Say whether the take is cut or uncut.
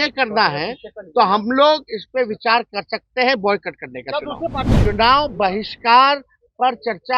cut